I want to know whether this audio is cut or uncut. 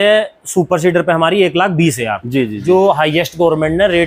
uncut